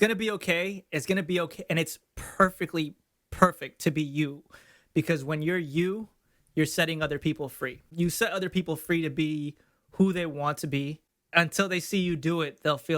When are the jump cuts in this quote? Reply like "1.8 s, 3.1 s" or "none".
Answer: 7.9 s, 11.1 s